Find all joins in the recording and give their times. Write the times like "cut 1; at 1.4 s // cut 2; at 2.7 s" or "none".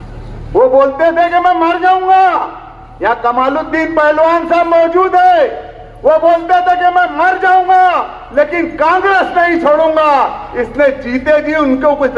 none